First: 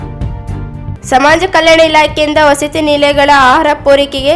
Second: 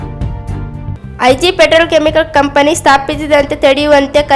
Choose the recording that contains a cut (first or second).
first